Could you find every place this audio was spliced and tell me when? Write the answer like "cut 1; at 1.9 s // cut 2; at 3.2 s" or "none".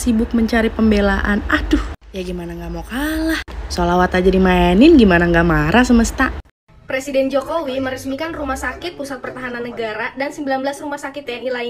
cut 1; at 6.3 s